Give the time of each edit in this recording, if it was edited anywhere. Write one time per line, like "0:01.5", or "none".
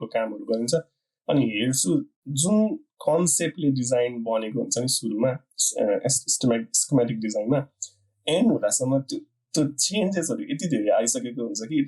none